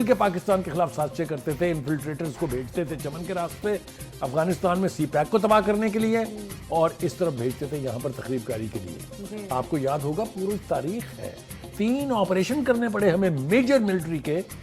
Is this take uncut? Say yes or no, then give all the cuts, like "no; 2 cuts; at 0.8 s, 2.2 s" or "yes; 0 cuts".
yes; 0 cuts